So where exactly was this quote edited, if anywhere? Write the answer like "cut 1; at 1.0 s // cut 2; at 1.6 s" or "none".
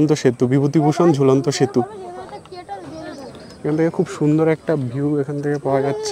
none